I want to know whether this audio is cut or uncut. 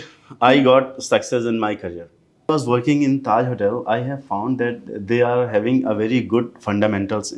cut